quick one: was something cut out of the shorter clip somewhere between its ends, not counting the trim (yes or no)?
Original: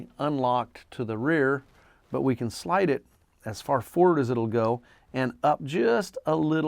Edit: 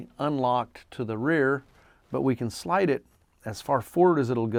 no